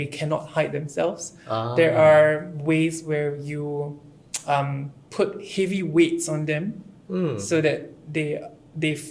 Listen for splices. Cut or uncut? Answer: uncut